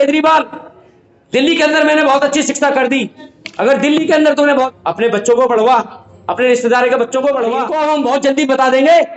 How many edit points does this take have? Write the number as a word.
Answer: two